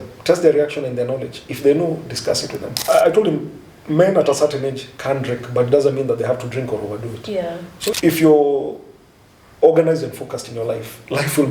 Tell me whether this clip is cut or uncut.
cut